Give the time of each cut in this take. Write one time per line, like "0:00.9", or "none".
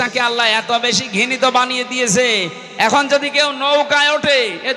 none